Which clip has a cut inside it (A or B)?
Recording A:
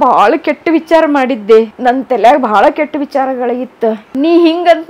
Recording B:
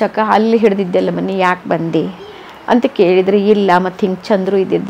A